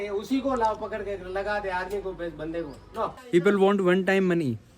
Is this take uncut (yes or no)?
no